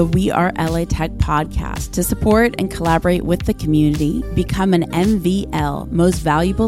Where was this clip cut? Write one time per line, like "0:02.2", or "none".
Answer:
none